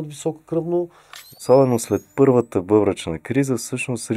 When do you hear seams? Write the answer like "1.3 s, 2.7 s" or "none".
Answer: 1.4 s